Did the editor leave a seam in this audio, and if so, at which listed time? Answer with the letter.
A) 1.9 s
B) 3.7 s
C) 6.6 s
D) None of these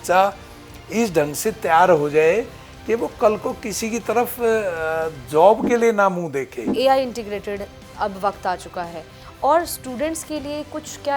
C